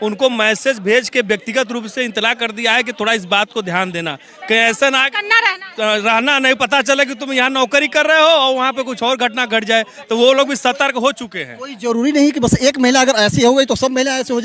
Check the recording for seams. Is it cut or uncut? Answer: uncut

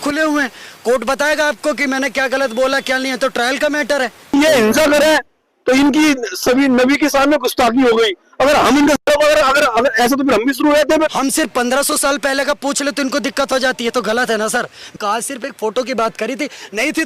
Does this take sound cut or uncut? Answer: cut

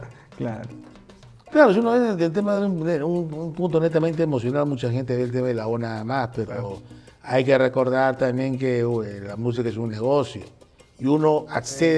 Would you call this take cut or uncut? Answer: uncut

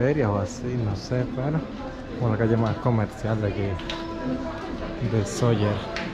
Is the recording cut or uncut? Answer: uncut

